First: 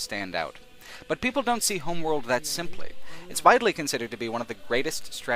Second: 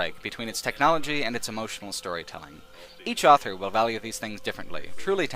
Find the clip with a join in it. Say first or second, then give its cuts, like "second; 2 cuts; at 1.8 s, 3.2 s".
first; 1 cut; at 3.6 s